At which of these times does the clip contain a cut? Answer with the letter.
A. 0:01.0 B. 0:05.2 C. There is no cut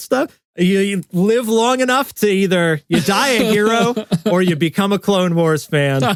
C